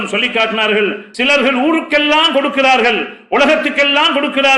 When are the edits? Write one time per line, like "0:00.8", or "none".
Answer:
0:01.0